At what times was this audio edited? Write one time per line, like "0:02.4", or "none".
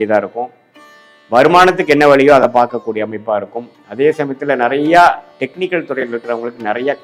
none